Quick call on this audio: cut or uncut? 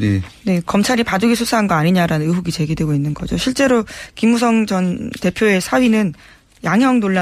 cut